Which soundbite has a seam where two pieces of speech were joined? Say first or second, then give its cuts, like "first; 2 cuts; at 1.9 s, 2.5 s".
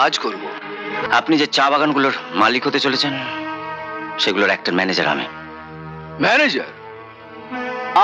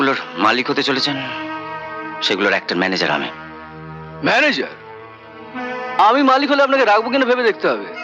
first; 1 cut; at 1.0 s